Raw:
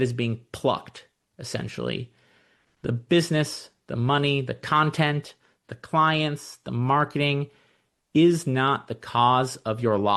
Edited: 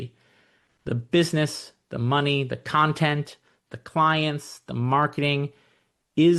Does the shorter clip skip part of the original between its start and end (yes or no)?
no